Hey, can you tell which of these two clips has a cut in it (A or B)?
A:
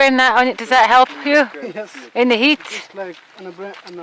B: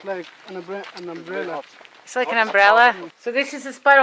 B